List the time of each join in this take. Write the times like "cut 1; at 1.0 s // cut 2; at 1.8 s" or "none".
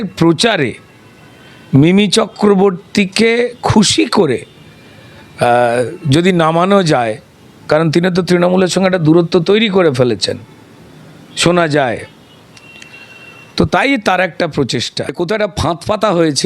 cut 1; at 15.1 s